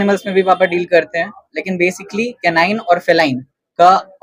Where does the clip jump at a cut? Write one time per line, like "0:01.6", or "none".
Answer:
none